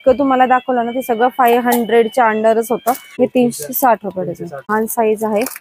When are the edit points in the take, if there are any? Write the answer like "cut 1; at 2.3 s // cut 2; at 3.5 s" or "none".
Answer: cut 1; at 3.1 s // cut 2; at 4.7 s